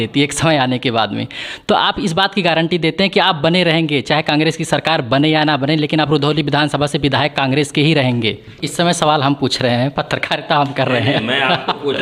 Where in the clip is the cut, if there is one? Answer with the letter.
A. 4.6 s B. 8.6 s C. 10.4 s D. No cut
B